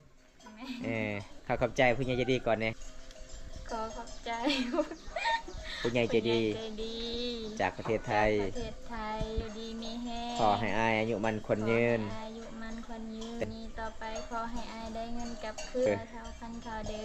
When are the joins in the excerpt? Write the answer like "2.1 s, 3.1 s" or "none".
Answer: 2.8 s, 9.4 s, 13.4 s, 15.9 s